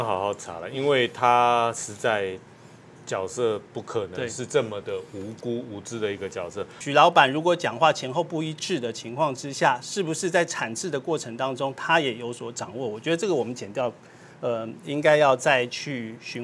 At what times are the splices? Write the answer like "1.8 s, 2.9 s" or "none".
6.8 s